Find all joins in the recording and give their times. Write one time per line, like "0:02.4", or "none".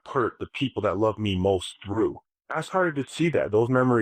none